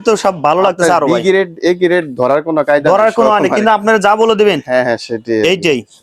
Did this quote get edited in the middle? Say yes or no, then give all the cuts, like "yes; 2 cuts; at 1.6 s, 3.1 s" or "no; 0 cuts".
no; 0 cuts